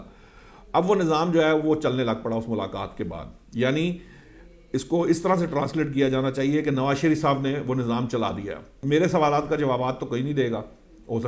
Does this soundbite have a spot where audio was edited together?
yes; 1 cut; at 8.8 s

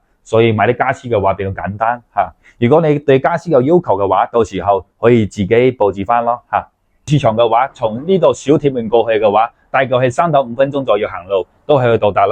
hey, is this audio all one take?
no; 1 cut; at 7.1 s

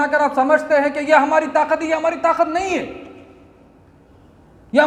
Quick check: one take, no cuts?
yes; 0 cuts

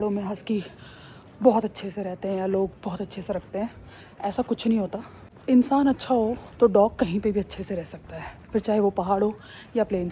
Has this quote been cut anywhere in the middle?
no; 0 cuts

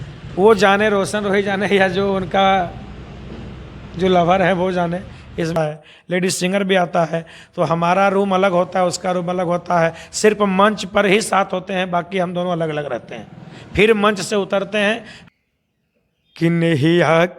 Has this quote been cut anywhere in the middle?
yes; 2 cuts; at 5.6 s, 15.1 s

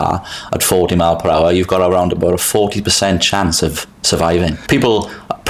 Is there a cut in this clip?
yes; 1 cut; at 4.6 s

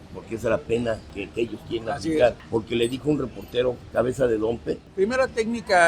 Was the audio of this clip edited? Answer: yes; 4 cuts; at 1.2 s, 2.4 s, 3.8 s, 4.9 s

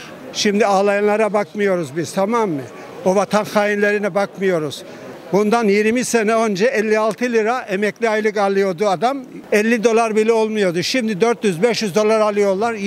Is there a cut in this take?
no; 0 cuts

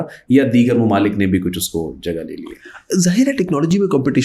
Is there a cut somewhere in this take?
no; 0 cuts

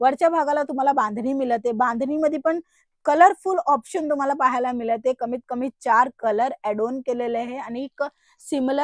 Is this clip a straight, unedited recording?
yes; 0 cuts

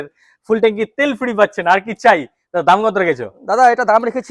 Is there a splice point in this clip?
no; 0 cuts

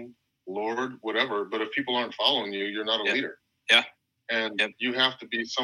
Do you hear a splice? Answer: no; 0 cuts

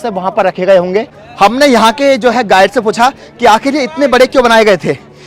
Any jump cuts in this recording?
no; 0 cuts

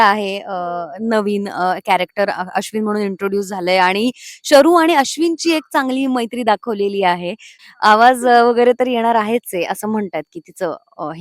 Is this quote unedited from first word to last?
no; 1 cut; at 7.5 s

